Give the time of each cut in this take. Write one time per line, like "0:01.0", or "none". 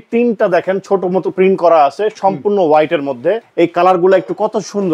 0:03.5